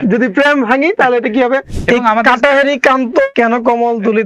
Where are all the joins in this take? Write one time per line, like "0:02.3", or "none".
0:01.7
0:03.3